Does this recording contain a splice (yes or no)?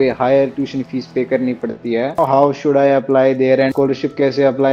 yes